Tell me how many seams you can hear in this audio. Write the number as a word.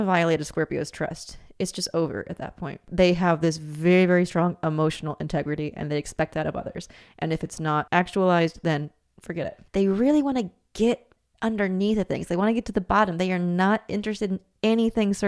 three